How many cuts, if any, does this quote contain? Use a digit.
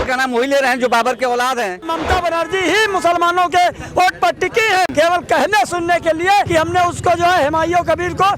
3